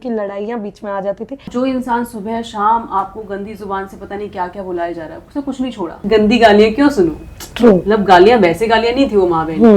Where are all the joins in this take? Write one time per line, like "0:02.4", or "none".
0:01.5
0:05.9